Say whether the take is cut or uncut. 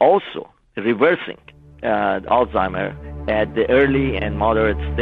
uncut